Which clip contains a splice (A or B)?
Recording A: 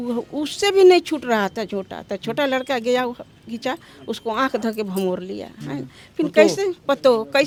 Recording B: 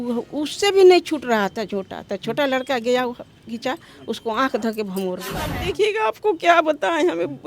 B